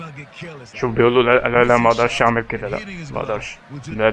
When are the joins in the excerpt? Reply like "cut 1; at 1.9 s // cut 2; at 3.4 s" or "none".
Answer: none